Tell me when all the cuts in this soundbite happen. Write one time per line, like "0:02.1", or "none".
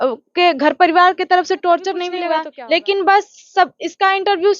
0:02.3